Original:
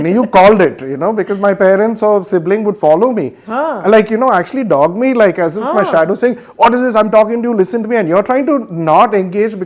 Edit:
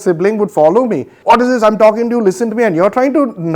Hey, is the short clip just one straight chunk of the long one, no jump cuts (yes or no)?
no